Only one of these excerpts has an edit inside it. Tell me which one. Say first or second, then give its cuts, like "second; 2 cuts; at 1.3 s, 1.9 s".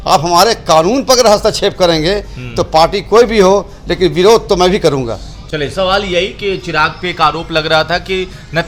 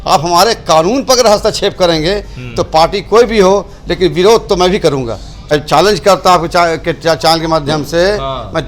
second; 1 cut; at 5.5 s